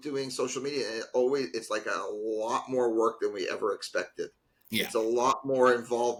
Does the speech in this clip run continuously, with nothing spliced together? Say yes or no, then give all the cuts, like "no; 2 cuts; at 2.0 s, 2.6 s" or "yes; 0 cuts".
yes; 0 cuts